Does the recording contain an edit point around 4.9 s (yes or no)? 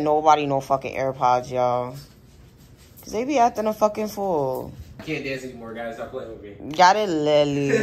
yes